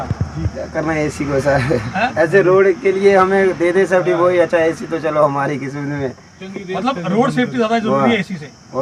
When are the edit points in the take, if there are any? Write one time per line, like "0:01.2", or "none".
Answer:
none